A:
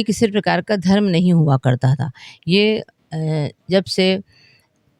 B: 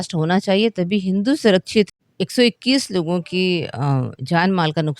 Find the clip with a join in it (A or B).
B